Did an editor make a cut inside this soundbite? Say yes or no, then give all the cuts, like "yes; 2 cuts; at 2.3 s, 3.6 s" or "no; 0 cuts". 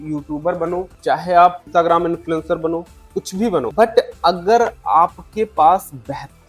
yes; 3 cuts; at 0.9 s, 1.7 s, 3.7 s